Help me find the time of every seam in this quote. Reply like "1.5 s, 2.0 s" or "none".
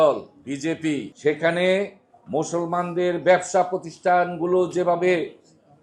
1.1 s